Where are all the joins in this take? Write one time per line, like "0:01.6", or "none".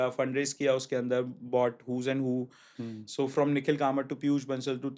0:02.8